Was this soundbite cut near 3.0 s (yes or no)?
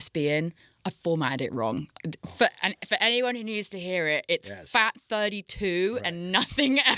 no